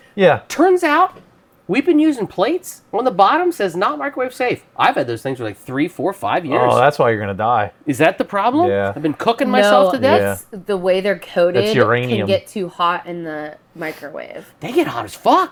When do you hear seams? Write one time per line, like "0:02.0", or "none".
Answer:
none

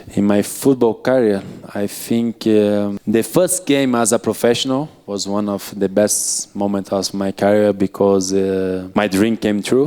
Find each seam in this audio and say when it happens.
0:03.0
0:08.8

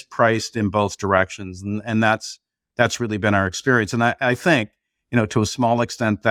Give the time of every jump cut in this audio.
none

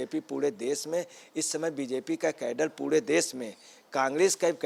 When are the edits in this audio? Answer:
none

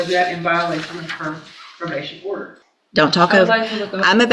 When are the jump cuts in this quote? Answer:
0:02.5

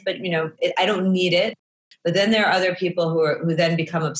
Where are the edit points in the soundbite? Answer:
0:01.6

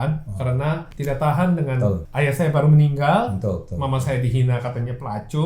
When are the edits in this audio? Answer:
0:00.9
0:02.1

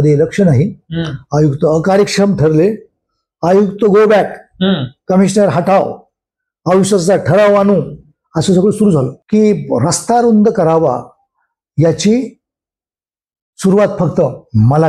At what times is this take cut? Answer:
0:09.2

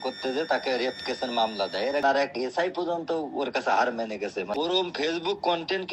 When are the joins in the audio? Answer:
0:02.0
0:04.6

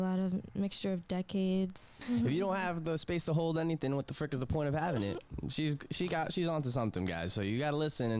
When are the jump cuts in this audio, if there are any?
0:01.9

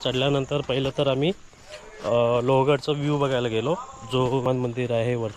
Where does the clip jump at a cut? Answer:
0:04.5

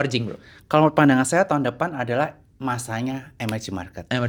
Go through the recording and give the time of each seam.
none

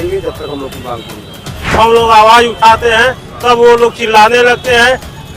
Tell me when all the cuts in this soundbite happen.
0:01.7

